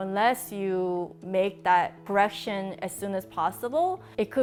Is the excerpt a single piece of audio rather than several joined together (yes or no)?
yes